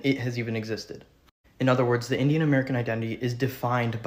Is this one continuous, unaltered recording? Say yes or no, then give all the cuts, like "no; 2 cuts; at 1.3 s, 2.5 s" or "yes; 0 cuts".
yes; 0 cuts